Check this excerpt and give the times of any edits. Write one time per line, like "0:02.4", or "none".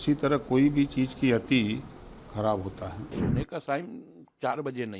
0:03.0